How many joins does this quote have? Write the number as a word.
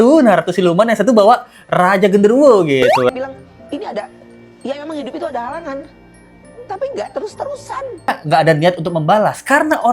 two